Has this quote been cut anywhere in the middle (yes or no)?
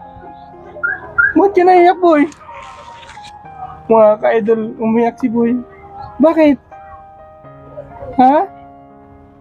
no